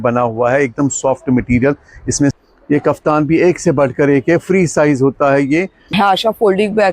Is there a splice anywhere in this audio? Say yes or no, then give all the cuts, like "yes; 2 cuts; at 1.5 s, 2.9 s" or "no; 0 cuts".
yes; 2 cuts; at 2.3 s, 5.8 s